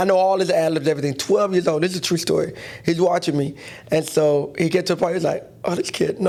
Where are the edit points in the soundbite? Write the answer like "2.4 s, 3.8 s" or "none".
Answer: none